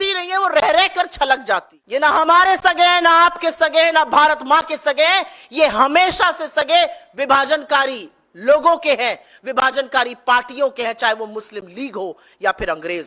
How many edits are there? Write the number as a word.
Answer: one